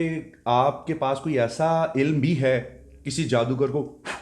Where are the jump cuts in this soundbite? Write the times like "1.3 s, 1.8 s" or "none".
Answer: none